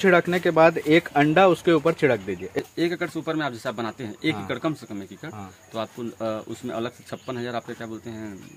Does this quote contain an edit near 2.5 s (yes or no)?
yes